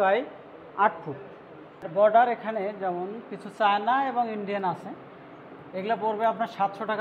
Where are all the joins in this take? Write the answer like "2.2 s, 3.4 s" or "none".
1.9 s

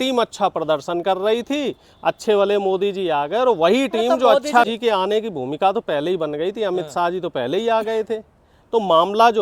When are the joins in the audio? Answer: 4.7 s

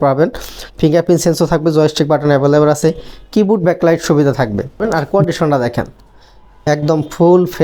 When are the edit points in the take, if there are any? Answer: 4.8 s

